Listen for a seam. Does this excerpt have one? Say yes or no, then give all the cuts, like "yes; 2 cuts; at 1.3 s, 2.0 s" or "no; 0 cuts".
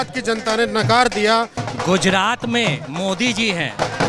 yes; 1 cut; at 1.6 s